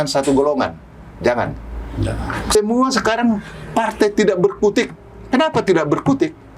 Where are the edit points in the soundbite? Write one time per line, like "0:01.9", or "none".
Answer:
0:02.6